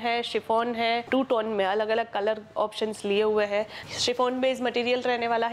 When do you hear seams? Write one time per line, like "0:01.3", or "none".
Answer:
0:01.0
0:03.8